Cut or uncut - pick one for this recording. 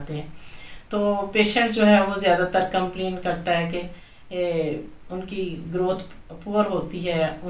uncut